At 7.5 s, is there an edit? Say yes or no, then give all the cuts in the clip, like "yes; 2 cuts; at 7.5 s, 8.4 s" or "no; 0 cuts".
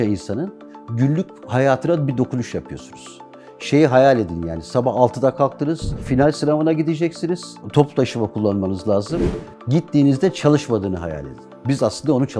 yes; 2 cuts; at 6.1 s, 7.5 s